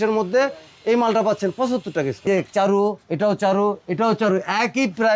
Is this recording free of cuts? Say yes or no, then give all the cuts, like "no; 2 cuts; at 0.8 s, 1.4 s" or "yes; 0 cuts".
no; 1 cut; at 2.2 s